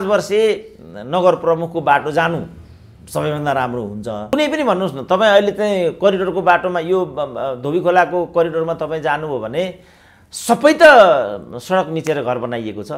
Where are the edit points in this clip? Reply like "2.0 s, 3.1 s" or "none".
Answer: 4.3 s